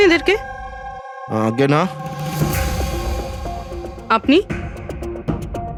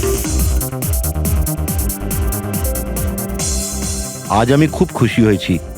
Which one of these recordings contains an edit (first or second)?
second